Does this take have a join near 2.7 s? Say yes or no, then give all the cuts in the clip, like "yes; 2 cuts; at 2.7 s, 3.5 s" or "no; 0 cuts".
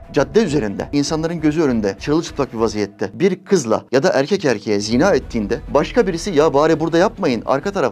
no; 0 cuts